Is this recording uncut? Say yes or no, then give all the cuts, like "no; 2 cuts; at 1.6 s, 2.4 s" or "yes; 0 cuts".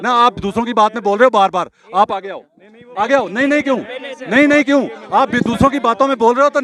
yes; 0 cuts